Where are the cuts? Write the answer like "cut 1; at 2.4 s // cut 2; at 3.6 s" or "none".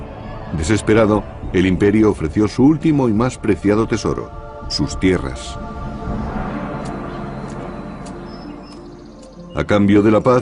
none